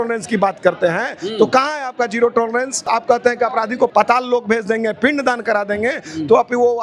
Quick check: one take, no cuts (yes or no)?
no